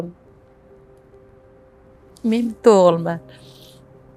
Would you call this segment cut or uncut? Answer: uncut